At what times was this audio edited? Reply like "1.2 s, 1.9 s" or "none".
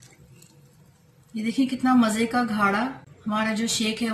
3.1 s